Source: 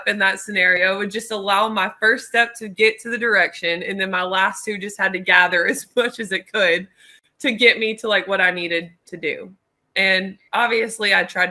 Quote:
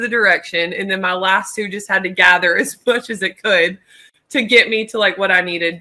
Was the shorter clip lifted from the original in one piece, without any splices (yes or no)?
yes